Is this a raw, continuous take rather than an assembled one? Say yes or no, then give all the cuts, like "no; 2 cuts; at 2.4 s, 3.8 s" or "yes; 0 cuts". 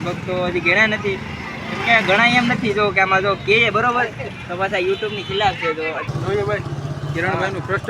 no; 1 cut; at 6.1 s